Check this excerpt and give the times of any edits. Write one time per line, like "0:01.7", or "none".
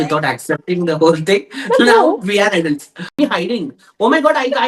0:03.1